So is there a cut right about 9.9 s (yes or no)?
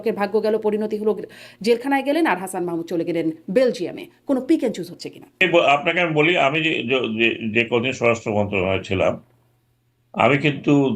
no